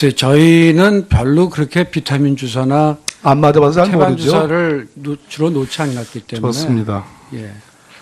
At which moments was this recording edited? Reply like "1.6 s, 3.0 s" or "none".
1.6 s